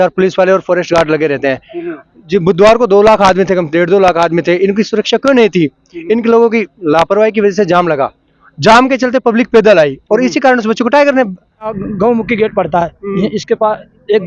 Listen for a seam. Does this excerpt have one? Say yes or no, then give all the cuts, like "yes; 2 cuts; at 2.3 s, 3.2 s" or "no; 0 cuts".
yes; 1 cut; at 11.8 s